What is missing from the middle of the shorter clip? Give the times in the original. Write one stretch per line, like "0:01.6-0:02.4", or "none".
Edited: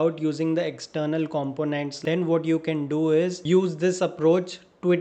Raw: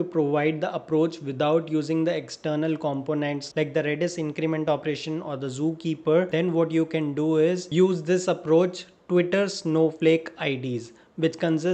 0:03.5-0:06.3